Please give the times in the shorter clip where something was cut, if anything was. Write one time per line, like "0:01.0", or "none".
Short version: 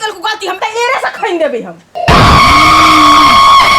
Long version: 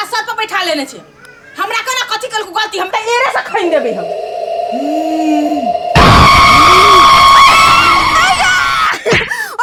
0:01.9